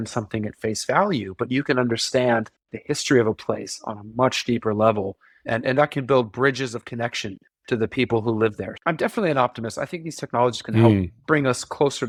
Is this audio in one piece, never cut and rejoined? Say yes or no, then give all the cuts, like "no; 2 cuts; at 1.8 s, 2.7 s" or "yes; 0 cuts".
yes; 0 cuts